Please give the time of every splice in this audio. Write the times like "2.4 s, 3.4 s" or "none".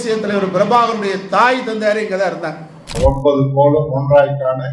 3.0 s